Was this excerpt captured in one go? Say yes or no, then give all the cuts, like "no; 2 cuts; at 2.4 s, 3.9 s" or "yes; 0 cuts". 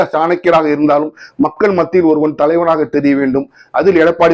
yes; 0 cuts